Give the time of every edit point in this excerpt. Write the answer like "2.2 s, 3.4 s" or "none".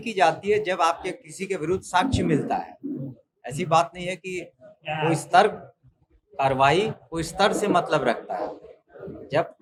none